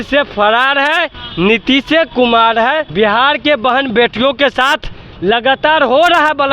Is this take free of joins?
no; 1 cut; at 2.9 s

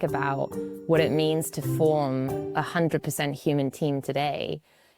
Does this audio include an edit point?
no; 0 cuts

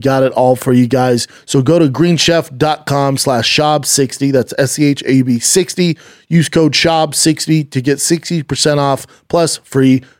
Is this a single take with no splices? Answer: no; 1 cut; at 1.3 s

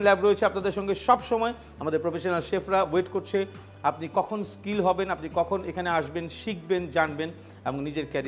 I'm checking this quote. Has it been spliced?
no; 0 cuts

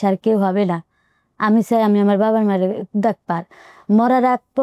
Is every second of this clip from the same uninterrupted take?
yes; 0 cuts

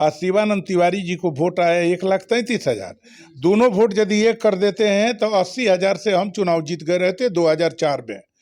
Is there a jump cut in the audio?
no; 0 cuts

